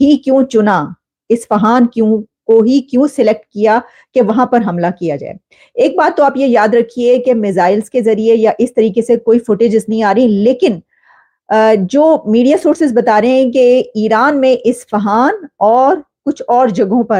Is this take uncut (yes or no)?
yes